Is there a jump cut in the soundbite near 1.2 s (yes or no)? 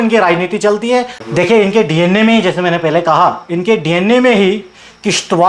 yes